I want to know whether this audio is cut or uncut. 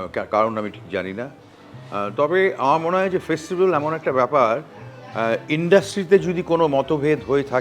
uncut